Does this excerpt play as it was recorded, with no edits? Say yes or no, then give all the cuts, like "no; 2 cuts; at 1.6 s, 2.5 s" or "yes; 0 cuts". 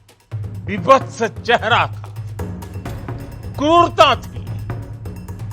no; 2 cuts; at 0.7 s, 4.6 s